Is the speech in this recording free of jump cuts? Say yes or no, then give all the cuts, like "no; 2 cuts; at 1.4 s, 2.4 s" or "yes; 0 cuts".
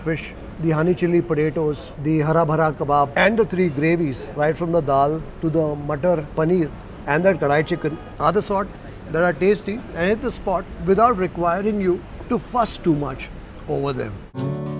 yes; 0 cuts